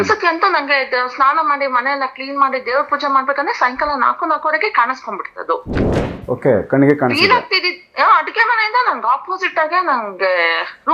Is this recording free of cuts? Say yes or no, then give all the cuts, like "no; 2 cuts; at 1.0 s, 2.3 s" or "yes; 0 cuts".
yes; 0 cuts